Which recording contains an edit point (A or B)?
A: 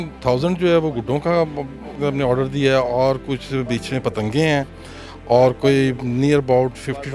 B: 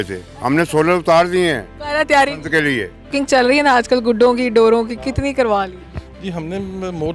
B